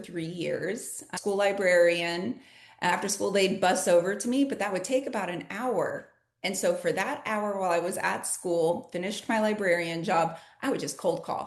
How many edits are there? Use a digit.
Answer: 2